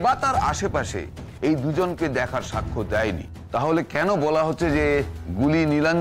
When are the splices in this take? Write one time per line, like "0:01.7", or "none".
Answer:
0:03.3